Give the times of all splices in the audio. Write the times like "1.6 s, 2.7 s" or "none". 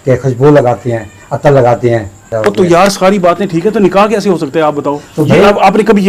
2.3 s